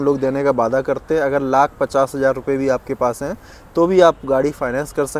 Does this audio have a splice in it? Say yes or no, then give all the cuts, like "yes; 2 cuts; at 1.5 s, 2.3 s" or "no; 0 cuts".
no; 0 cuts